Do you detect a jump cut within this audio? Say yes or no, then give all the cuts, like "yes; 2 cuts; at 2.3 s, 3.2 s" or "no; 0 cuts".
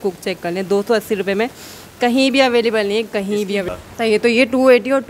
no; 0 cuts